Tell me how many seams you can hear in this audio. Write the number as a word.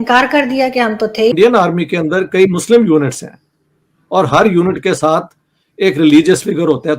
one